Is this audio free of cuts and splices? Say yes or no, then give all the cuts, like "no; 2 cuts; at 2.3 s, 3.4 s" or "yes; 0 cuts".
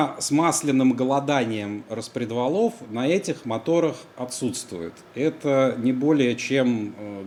yes; 0 cuts